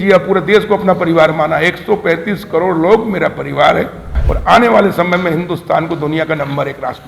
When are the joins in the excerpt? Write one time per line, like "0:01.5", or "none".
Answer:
0:04.2